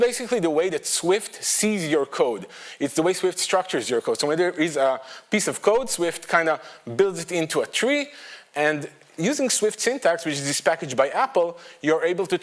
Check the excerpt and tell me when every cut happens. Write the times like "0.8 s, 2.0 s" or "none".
none